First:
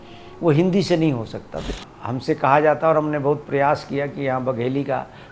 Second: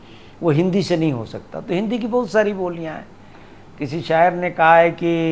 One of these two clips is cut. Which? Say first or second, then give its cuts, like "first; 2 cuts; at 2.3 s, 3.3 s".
first; 1 cut; at 1.6 s